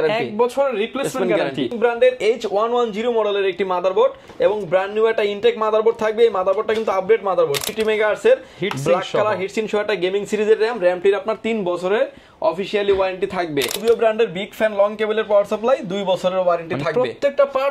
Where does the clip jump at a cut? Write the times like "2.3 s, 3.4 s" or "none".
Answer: 1.7 s, 7.7 s, 13.8 s

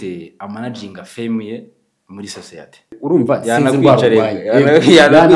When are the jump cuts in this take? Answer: 2.9 s

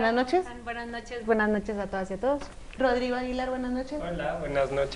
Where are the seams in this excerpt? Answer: 3.3 s

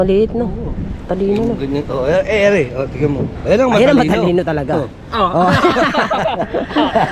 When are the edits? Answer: none

